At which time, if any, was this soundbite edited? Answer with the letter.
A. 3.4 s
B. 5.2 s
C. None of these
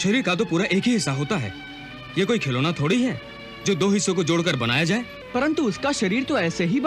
B